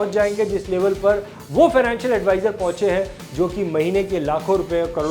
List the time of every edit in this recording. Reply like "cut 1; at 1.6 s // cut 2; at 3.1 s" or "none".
none